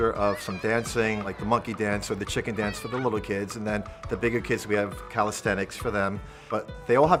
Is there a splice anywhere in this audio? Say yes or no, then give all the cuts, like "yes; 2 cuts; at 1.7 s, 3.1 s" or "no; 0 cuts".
no; 0 cuts